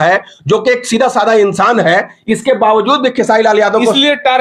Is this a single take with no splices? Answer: yes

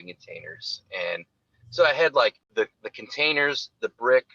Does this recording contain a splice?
yes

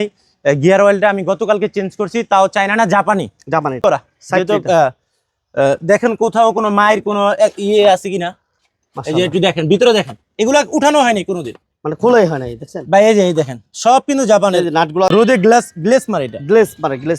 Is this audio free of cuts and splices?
no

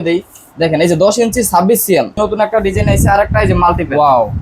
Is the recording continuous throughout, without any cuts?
no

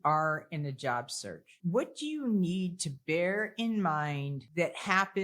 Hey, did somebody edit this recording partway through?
yes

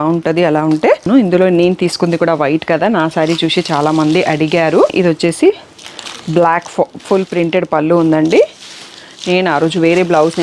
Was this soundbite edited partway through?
yes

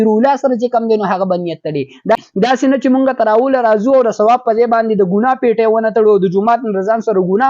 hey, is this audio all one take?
no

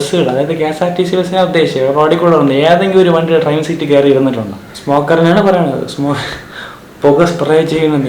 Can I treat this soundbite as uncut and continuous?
no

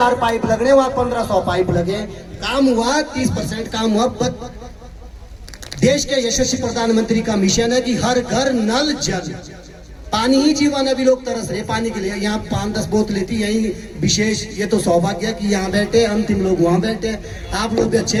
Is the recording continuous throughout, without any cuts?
yes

